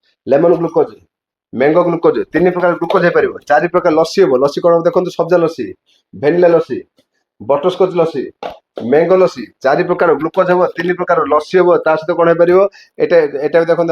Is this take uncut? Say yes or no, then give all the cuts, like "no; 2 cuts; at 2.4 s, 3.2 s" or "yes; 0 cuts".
yes; 0 cuts